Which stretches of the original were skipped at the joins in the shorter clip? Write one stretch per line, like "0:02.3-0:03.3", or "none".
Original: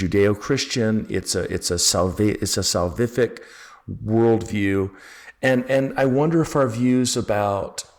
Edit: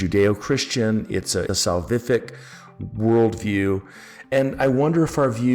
0:01.5-0:02.5
0:05.3-0:05.6